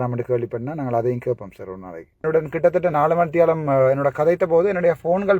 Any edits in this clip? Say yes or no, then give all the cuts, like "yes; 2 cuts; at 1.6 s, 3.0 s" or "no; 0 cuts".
yes; 1 cut; at 2.2 s